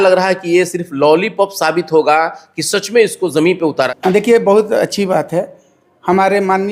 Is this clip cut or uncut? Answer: uncut